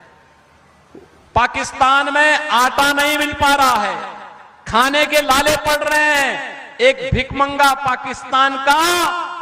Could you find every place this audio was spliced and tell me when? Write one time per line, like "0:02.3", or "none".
none

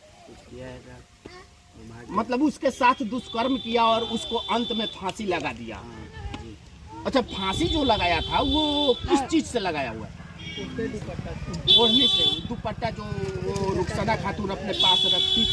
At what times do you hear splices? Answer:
none

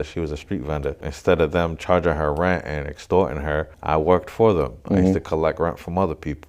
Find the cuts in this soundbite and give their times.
0:01.1
0:03.7

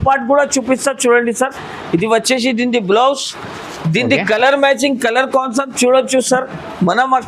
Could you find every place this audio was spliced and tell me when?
none

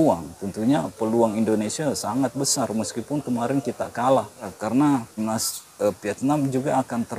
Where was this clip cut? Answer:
0:04.6
0:05.2

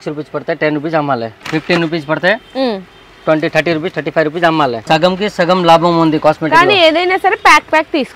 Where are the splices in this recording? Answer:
0:01.4
0:04.8

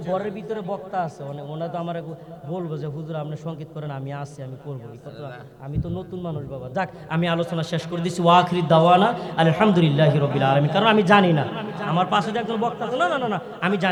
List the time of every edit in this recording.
none

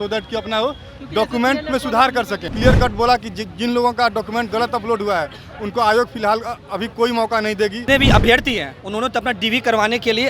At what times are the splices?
0:02.4
0:07.8

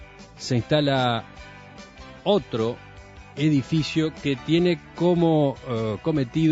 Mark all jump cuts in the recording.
0:05.4

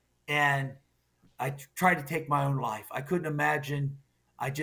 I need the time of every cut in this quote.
none

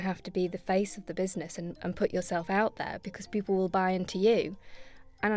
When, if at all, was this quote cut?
none

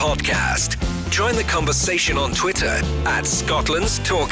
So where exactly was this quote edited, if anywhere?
none

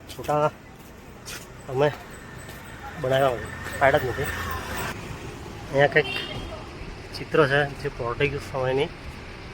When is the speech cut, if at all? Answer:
0:04.8

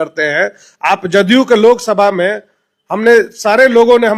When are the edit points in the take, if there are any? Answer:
none

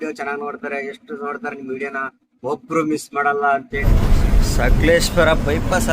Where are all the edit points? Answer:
0:03.8

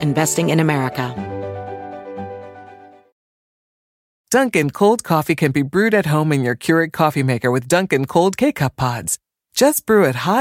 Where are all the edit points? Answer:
0:01.1

